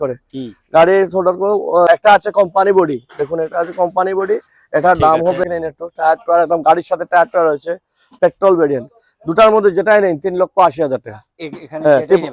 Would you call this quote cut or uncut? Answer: cut